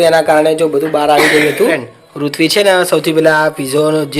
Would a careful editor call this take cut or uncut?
cut